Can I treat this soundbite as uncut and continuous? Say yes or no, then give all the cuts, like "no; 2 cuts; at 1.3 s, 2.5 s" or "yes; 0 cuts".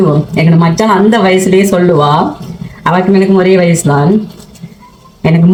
yes; 0 cuts